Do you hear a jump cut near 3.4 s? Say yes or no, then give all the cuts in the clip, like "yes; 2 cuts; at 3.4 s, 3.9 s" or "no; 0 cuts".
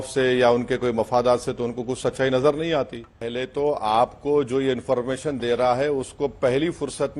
yes; 1 cut; at 3.4 s